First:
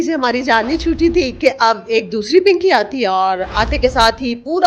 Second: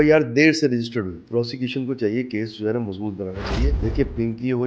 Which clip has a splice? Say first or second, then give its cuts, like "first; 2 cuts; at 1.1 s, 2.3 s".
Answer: second; 2 cuts; at 1.2 s, 3.8 s